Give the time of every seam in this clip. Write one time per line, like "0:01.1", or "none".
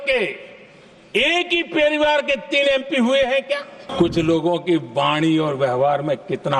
0:03.8